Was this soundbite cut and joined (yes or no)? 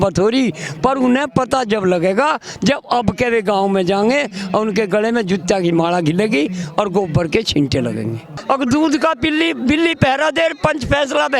yes